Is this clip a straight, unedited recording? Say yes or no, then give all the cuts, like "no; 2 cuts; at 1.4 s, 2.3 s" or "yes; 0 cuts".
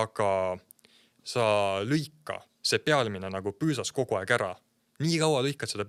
yes; 0 cuts